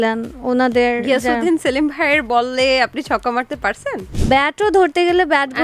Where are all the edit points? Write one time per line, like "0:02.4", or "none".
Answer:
0:04.1